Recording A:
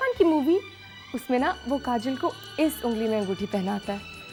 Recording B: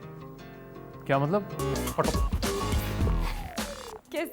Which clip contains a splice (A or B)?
B